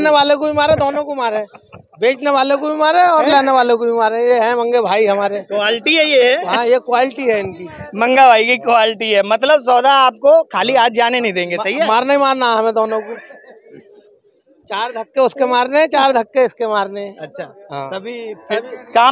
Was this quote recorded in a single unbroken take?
yes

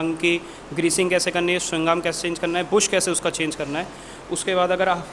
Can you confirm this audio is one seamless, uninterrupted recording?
yes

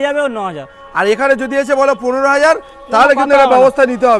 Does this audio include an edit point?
no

